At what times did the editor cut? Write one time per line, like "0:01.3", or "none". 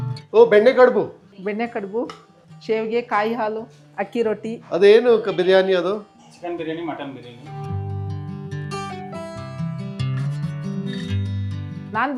none